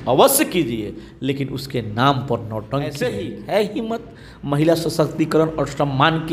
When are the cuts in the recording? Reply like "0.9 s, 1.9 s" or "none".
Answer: 2.9 s